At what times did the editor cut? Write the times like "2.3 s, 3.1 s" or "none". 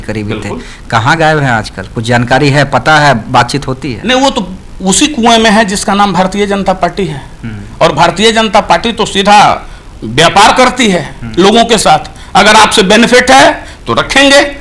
none